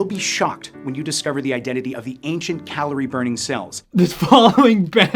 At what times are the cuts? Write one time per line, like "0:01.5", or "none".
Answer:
none